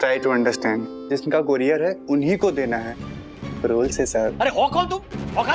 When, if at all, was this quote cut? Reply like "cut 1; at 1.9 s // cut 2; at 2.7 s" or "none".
cut 1; at 0.9 s // cut 2; at 4.3 s